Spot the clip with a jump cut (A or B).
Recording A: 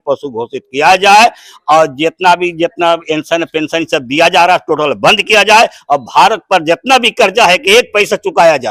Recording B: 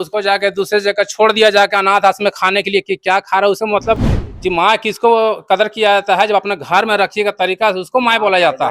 B